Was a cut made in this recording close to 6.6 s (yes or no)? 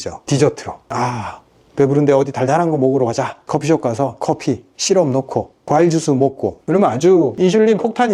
yes